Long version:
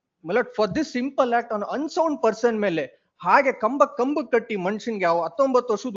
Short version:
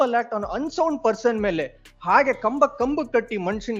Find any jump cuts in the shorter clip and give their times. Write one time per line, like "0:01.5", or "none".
none